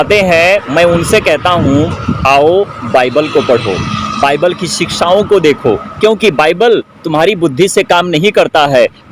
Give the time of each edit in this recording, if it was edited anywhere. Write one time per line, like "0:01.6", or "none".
none